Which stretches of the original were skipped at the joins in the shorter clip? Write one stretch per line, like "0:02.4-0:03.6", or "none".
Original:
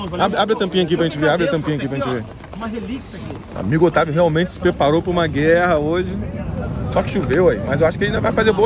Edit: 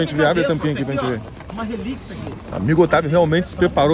none